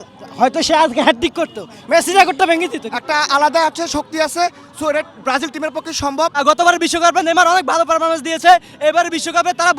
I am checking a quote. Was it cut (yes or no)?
yes